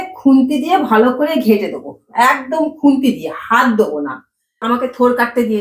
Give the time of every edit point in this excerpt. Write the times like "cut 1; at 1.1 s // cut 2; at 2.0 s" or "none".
cut 1; at 4.6 s